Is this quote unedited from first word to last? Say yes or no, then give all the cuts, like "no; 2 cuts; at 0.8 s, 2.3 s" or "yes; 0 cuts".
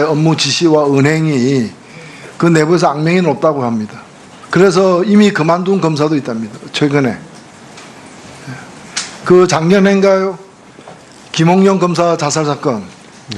yes; 0 cuts